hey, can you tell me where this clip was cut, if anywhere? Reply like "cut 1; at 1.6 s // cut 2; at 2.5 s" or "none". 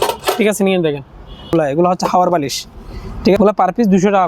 cut 1; at 1.5 s // cut 2; at 3.4 s